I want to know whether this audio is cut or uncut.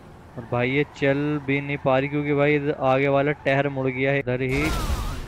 cut